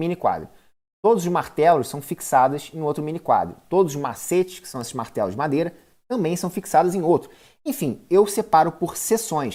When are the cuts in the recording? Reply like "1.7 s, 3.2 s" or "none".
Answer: none